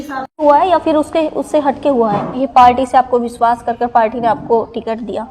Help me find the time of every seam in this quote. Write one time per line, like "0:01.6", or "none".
0:02.3